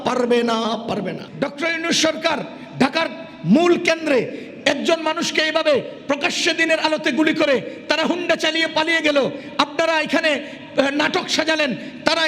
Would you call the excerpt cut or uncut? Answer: cut